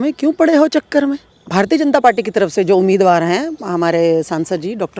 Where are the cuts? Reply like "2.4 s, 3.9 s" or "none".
1.4 s